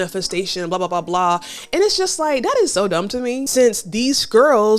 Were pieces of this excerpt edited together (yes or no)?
yes